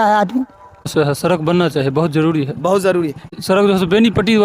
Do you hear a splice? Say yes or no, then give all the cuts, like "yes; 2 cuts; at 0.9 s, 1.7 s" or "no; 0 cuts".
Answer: yes; 2 cuts; at 0.9 s, 3.3 s